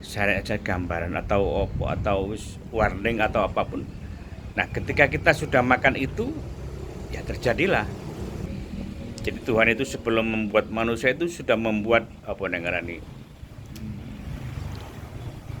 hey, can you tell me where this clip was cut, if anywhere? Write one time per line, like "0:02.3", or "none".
0:08.6